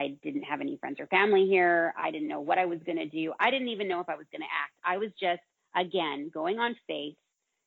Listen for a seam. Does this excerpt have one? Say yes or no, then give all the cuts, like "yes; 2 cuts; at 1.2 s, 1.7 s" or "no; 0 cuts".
no; 0 cuts